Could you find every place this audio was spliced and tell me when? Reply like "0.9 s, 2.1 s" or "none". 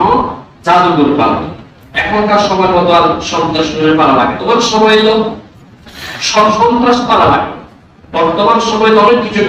4.4 s